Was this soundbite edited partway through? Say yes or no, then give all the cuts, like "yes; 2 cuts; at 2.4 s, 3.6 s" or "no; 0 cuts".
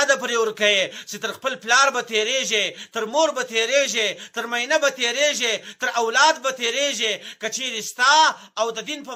no; 0 cuts